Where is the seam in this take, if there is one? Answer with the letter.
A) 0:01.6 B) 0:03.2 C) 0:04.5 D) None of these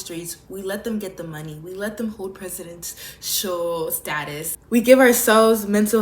C